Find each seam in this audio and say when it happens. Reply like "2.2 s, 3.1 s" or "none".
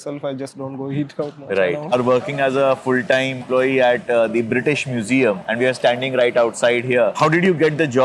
1.9 s, 5.4 s, 7.1 s